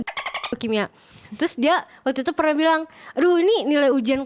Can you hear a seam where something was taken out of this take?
no; 0 cuts

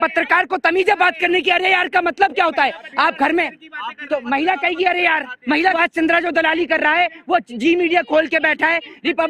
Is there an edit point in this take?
yes; 1 cut; at 5.8 s

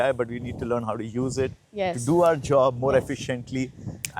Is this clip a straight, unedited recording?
yes; 0 cuts

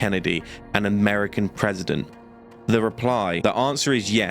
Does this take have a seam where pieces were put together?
yes; 1 cut; at 3.4 s

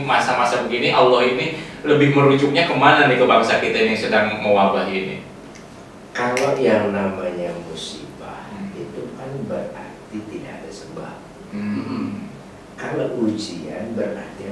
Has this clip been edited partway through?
no; 0 cuts

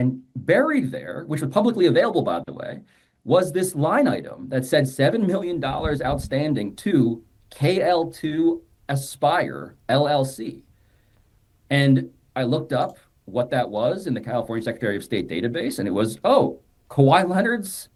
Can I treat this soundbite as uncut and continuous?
yes; 0 cuts

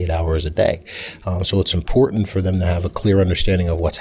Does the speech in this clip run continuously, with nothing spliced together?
yes; 0 cuts

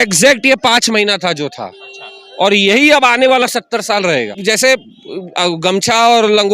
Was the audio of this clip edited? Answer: yes; 1 cut; at 4.4 s

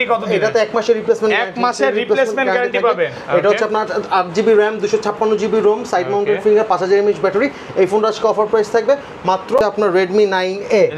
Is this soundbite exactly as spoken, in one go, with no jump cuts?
no; 1 cut; at 9.6 s

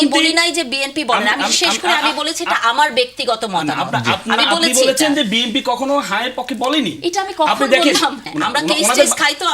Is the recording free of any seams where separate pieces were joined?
no; 1 cut; at 8.3 s

